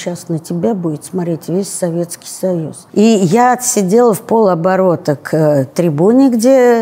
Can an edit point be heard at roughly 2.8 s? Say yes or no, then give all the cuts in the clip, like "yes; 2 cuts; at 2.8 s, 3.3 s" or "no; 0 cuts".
yes; 1 cut; at 2.8 s